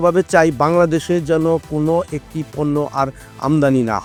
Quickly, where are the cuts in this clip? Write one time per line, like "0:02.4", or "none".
none